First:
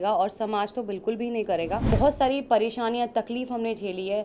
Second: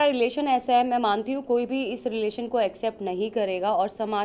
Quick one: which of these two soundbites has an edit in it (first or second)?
first